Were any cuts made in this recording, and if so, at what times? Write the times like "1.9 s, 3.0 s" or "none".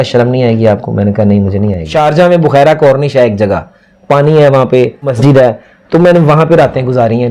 1.8 s, 5.1 s